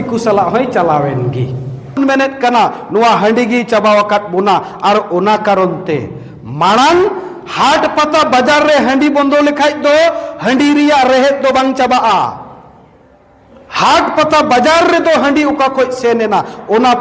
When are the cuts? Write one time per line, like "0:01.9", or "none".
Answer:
0:02.0